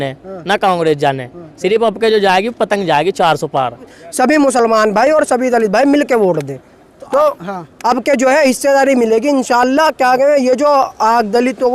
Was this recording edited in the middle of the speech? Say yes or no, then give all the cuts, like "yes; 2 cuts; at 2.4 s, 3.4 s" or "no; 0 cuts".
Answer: yes; 1 cut; at 4.0 s